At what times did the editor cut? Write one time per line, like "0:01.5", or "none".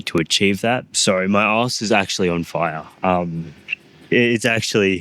0:01.0